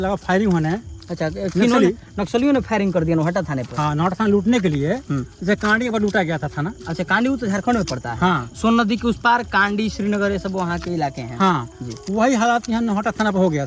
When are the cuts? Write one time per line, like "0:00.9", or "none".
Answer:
none